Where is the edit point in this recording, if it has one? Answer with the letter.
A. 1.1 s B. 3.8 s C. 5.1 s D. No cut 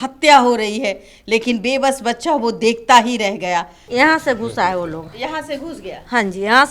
B